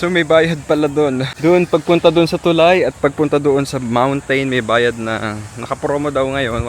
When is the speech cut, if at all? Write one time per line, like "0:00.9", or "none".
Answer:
0:01.3